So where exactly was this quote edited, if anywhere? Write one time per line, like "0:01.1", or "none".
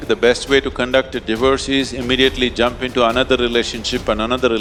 none